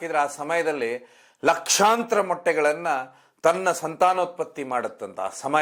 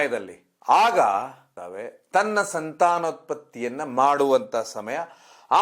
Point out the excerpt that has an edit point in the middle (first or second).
second